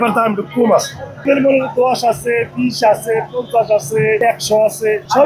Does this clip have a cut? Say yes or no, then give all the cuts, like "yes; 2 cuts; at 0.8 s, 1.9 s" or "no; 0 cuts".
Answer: no; 0 cuts